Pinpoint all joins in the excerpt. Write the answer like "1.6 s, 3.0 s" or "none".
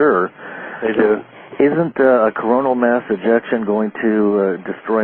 3.3 s